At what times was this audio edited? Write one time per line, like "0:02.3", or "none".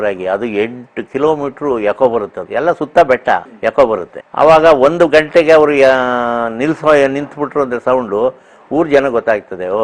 0:02.4
0:03.5
0:04.2